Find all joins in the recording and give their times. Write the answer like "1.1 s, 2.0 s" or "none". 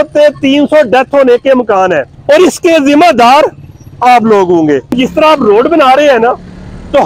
2.1 s, 5.0 s